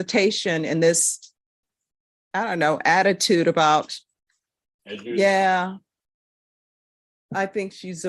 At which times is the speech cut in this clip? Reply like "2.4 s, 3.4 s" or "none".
none